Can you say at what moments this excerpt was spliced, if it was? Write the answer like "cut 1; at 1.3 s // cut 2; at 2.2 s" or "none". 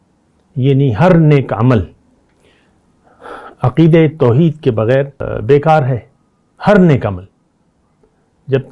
cut 1; at 5.3 s